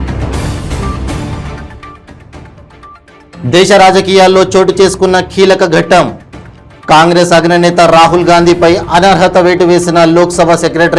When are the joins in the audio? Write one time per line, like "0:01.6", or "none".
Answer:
0:01.0
0:03.4